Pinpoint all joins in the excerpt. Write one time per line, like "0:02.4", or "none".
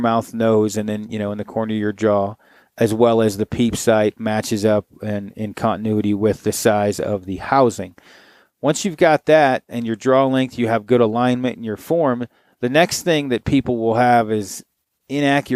none